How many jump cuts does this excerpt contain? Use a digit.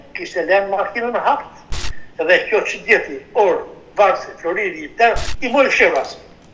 1